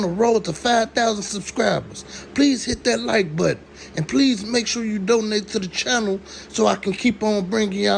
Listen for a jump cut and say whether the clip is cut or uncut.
uncut